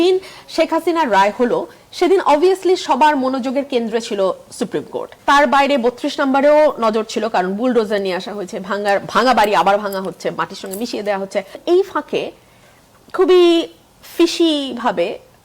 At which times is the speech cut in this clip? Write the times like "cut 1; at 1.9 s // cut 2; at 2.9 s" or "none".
cut 1; at 5.1 s // cut 2; at 11.6 s